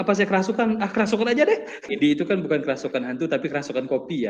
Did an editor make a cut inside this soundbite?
yes; 1 cut; at 1.9 s

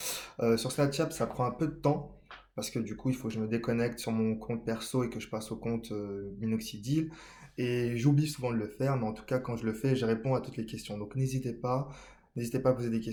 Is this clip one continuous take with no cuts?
yes; 0 cuts

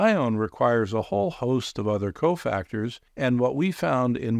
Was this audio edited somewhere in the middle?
no; 0 cuts

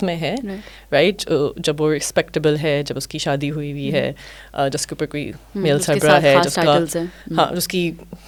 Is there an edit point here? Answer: no; 0 cuts

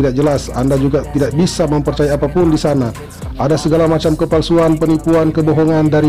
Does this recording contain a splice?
no; 0 cuts

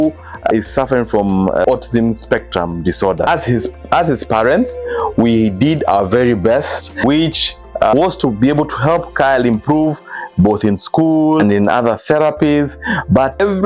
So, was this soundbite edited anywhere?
yes; 2 cuts; at 3.3 s, 7.0 s

